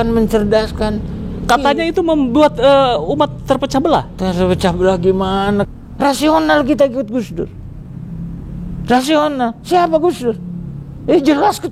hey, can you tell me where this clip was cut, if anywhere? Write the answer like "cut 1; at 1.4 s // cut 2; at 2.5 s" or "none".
cut 1; at 5.8 s